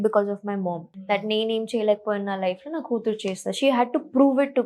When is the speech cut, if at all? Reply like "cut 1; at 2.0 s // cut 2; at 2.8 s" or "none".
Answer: cut 1; at 0.9 s

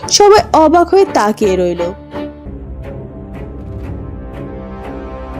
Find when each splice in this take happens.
cut 1; at 2.4 s

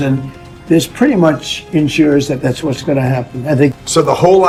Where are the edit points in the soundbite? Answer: none

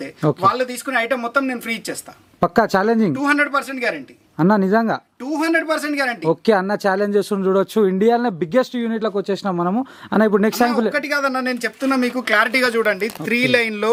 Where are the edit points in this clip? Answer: none

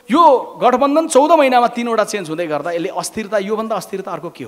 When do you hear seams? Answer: none

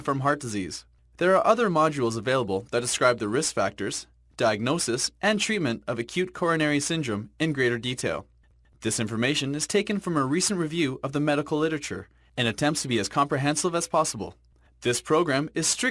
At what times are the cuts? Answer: none

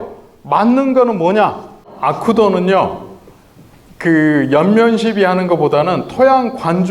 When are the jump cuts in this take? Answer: cut 1; at 1.9 s

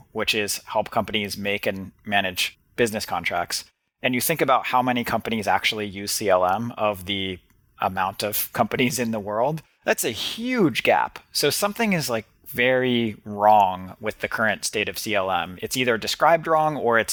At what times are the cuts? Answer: none

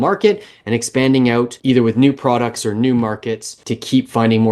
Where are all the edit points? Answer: cut 1; at 1.6 s // cut 2; at 3.5 s

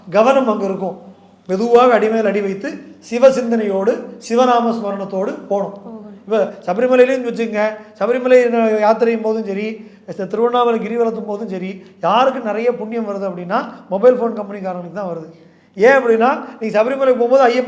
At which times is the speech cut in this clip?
none

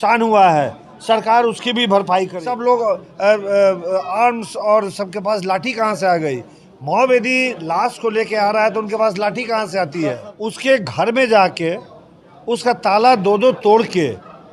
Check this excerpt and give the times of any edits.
cut 1; at 2.4 s // cut 2; at 10.3 s

